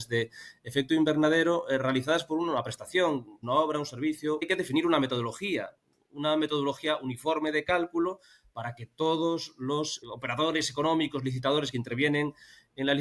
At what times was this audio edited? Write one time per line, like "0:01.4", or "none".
0:03.4
0:04.4
0:10.0